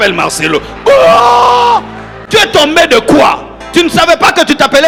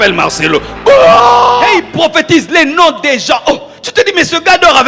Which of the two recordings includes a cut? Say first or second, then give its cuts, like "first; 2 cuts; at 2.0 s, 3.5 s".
second; 1 cut; at 1.8 s